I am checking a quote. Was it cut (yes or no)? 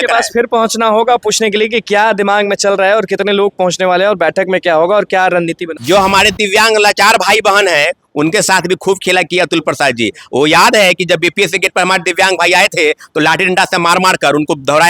yes